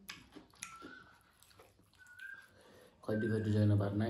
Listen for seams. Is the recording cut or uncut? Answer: uncut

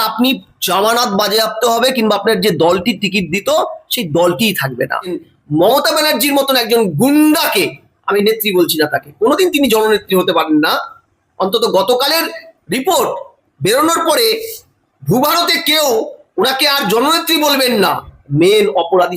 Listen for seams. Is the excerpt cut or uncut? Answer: cut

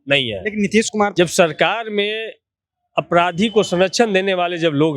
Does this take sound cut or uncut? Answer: cut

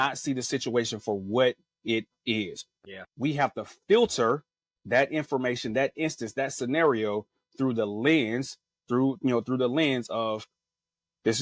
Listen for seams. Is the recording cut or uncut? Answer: uncut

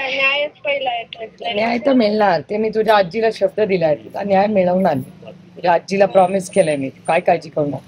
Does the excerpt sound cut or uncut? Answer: uncut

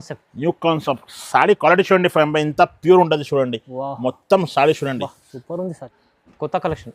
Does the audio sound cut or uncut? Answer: cut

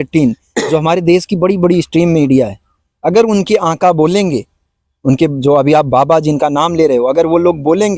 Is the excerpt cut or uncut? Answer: uncut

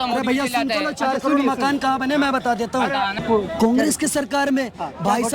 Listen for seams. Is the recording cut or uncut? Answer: cut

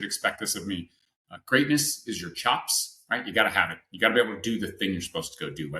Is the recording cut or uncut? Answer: uncut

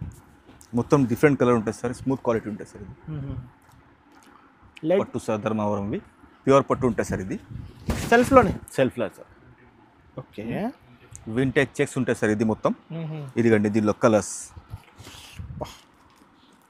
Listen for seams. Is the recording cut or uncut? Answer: cut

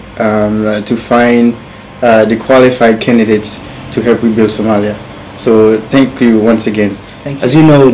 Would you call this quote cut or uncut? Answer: uncut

